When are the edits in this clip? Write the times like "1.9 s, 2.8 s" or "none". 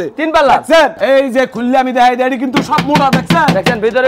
1.0 s